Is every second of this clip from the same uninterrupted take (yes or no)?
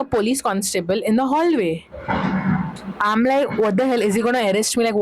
yes